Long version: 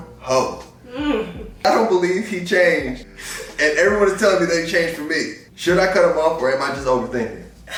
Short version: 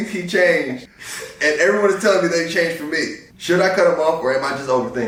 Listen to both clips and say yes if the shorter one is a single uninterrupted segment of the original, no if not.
yes